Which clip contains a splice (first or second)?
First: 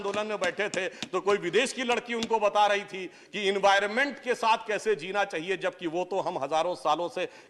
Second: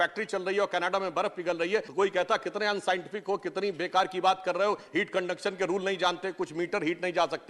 second